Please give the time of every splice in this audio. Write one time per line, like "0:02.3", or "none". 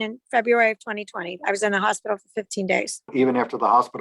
0:03.1